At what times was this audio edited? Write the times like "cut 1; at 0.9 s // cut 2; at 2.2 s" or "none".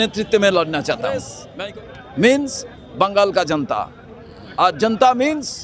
cut 1; at 1.4 s

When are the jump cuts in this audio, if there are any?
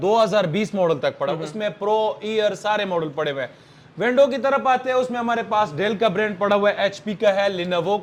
none

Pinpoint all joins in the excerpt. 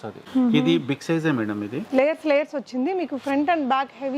cut 1; at 1.7 s

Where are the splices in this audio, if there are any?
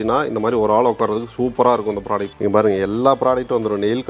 cut 1; at 2.3 s

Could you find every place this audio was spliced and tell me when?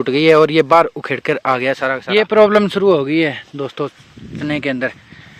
cut 1; at 1.9 s

